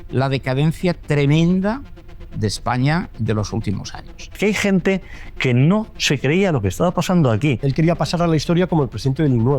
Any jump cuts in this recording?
yes; 2 cuts; at 4.3 s, 7.6 s

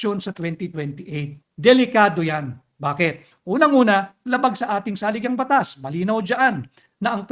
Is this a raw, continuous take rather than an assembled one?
no; 1 cut; at 1.4 s

